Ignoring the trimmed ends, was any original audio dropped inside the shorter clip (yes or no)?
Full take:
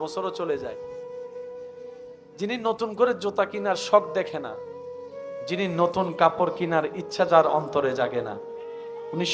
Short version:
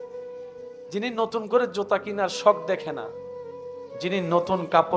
yes